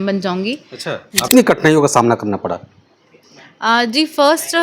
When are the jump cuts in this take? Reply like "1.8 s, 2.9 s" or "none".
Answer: 1.3 s

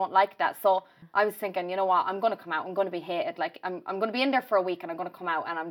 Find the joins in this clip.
1.0 s

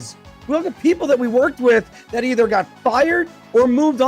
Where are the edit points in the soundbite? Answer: none

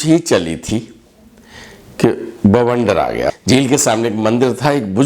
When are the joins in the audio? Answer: 3.3 s

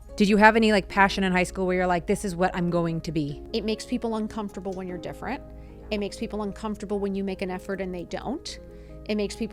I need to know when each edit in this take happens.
3.4 s

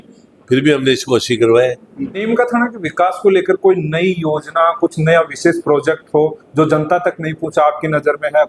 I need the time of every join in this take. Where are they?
2.2 s

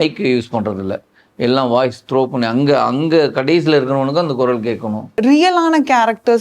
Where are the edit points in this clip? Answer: 5.2 s

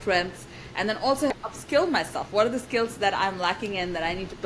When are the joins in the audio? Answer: 1.3 s

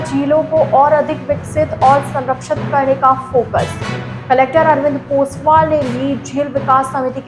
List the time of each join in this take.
none

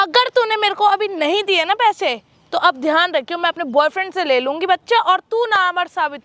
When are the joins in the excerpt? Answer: none

